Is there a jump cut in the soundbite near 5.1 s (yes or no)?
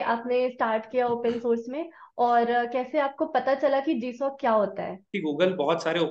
yes